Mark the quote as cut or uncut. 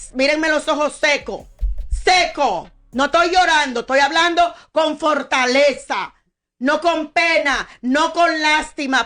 uncut